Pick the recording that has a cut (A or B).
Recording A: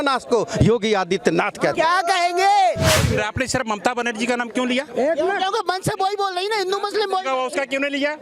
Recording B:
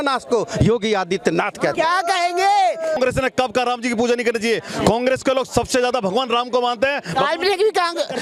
A